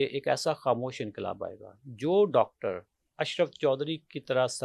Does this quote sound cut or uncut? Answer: uncut